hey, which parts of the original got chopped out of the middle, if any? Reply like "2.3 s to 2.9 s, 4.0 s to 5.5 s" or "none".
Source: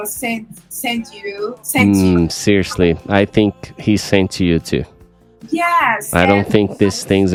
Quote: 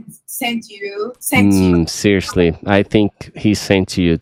none